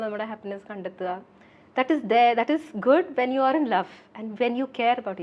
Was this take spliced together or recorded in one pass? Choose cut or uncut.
uncut